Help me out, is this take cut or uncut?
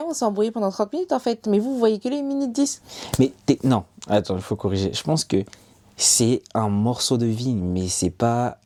uncut